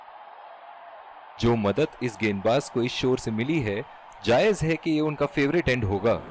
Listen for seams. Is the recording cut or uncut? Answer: cut